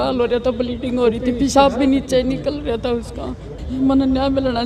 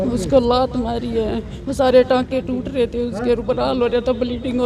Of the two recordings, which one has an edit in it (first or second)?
first